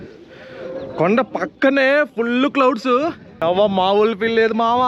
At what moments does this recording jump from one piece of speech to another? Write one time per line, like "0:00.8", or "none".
0:03.3